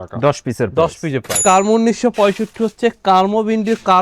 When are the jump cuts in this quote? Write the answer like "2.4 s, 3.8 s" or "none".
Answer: 1.4 s